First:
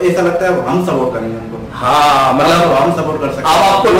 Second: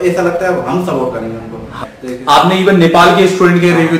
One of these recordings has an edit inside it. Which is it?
second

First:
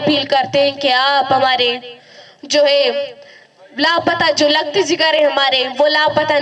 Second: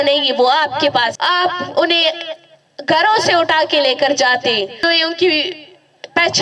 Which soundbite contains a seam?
second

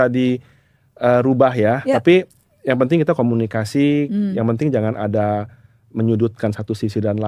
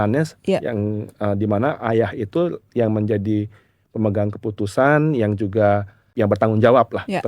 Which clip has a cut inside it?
second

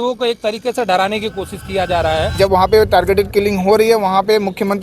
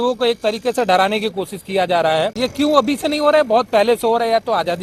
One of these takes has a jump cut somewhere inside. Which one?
first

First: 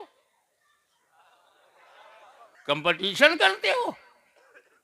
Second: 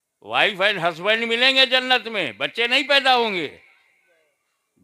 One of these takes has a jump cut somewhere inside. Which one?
first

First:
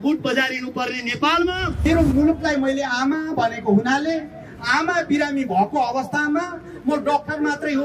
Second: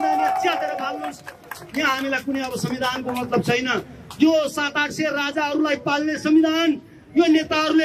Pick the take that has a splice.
first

